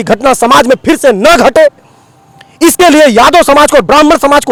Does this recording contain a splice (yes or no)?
no